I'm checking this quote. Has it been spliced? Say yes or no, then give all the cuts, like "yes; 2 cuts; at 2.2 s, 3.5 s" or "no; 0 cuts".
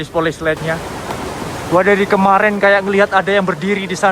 yes; 1 cut; at 0.9 s